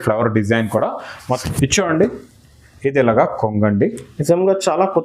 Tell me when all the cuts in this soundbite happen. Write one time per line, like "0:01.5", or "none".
0:01.2